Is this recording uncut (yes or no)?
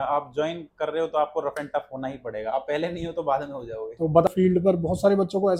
no